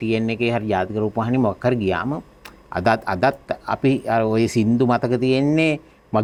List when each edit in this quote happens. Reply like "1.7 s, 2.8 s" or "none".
none